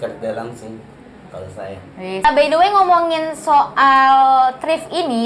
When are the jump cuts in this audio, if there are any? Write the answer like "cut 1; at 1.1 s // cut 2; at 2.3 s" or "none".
cut 1; at 2.2 s